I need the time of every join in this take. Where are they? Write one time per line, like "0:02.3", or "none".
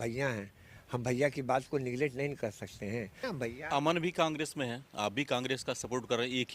0:03.2